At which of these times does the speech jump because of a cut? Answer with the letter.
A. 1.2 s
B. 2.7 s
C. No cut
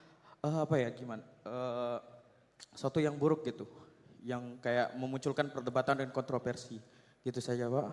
C